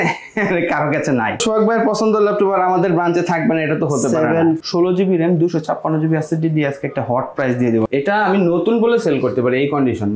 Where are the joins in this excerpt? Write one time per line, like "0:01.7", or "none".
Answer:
0:01.4
0:04.6
0:07.9